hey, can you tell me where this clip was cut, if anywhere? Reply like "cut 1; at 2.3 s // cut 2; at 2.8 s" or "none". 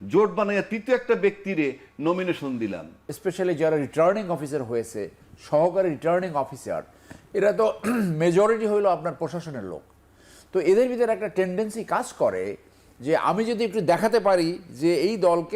cut 1; at 3.1 s